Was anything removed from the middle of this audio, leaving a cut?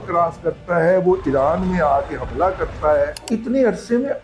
yes; 1 cut; at 3.2 s

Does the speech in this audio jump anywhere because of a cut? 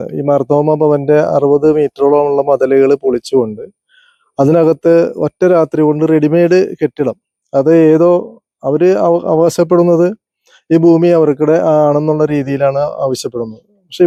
no; 0 cuts

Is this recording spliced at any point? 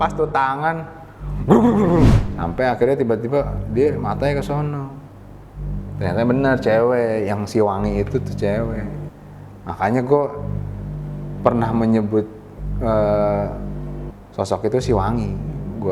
yes; 1 cut; at 2.1 s

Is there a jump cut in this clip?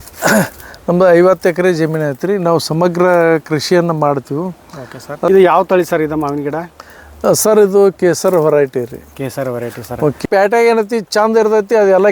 yes; 2 cuts; at 5.3 s, 10.2 s

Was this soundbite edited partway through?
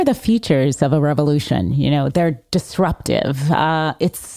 no; 0 cuts

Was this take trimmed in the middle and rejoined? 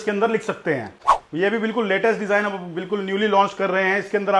yes; 1 cut; at 1.0 s

